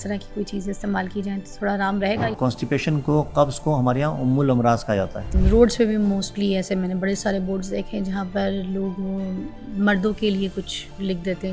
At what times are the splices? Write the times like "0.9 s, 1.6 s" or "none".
2.3 s, 5.3 s